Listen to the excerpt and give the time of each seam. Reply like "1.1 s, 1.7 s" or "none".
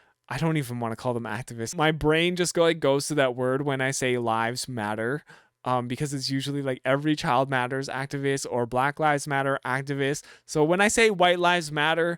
1.7 s